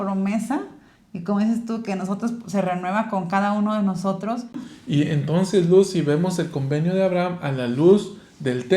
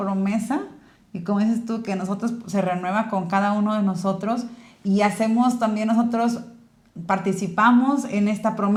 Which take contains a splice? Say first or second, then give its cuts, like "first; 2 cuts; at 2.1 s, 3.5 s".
first; 1 cut; at 4.7 s